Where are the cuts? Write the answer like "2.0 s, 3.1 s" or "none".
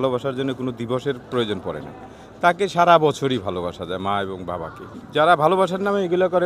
none